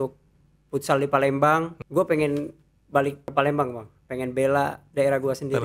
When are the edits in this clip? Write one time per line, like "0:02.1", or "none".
0:01.8
0:03.3
0:04.8